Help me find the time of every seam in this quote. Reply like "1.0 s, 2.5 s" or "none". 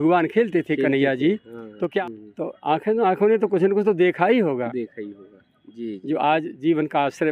2.0 s